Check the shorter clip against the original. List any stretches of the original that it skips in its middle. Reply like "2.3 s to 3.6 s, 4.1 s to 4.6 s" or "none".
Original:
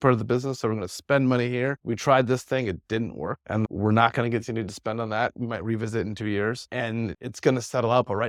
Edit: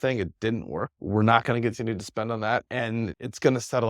3.5 s to 3.7 s, 5.3 s to 6.7 s